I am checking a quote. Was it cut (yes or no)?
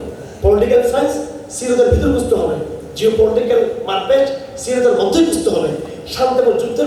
no